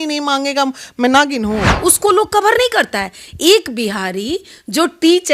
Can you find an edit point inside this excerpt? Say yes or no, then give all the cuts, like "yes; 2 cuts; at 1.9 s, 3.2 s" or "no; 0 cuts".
yes; 1 cut; at 1.7 s